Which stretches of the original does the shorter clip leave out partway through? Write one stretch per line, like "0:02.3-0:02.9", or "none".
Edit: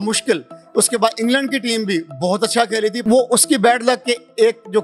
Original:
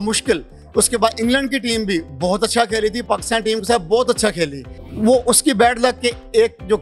0:03.0-0:04.9